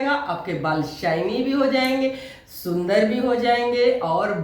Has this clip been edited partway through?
no; 0 cuts

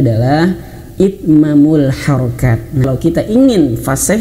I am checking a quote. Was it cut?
yes; 1 cut; at 2.9 s

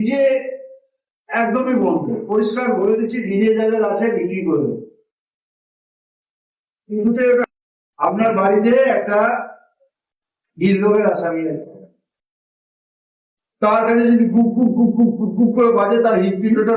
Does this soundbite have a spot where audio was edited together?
yes; 1 cut; at 7.5 s

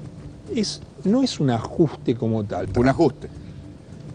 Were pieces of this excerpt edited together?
yes; 1 cut; at 2.6 s

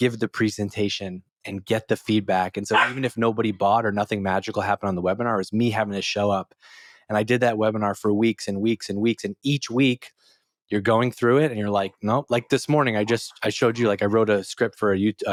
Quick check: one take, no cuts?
yes; 0 cuts

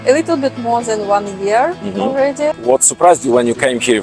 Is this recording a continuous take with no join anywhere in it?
no; 1 cut; at 2.6 s

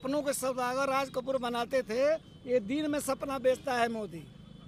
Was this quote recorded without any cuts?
yes; 0 cuts

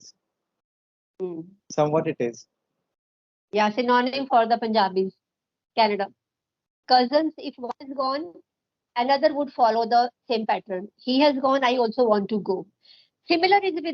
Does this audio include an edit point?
yes; 1 cut; at 6.8 s

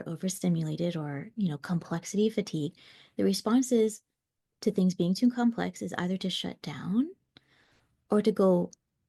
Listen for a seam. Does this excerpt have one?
no; 0 cuts

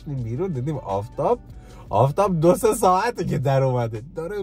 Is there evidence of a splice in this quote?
no; 0 cuts

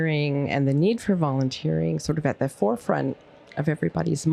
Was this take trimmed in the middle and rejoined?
no; 0 cuts

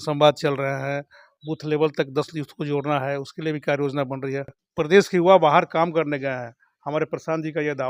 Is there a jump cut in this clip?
yes; 1 cut; at 4.5 s

